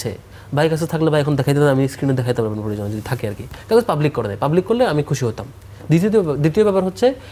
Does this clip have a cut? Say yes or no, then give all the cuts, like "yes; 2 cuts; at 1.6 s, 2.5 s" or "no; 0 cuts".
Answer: no; 0 cuts